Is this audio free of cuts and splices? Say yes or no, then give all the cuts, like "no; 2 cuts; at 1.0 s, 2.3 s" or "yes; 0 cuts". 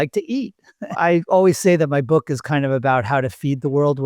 no; 1 cut; at 0.9 s